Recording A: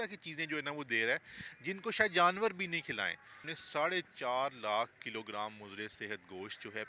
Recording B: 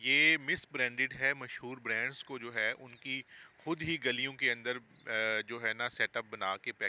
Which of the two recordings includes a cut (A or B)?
A